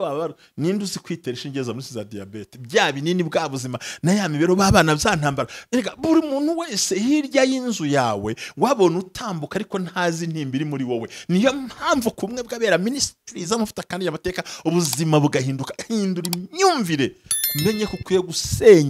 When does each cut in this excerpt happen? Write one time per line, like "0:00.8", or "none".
none